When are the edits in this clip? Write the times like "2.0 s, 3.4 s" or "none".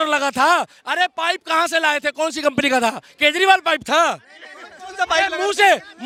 none